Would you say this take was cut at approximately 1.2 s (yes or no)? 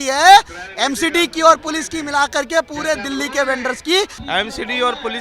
no